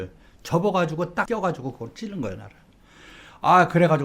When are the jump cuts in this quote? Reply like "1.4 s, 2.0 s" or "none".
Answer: 1.3 s